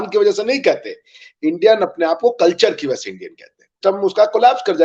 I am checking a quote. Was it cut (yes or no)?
yes